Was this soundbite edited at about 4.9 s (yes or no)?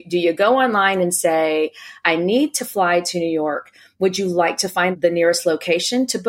yes